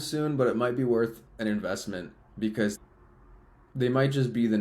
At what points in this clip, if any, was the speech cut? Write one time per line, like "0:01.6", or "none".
0:02.8